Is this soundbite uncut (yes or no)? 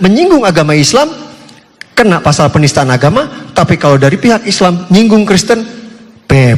yes